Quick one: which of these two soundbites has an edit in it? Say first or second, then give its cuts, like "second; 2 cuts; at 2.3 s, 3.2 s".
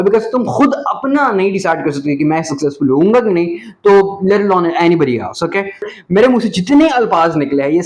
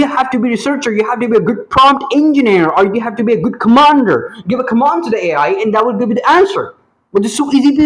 first; 1 cut; at 5.8 s